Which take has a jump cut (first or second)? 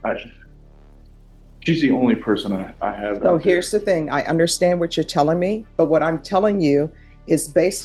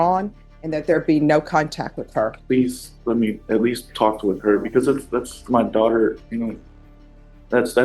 second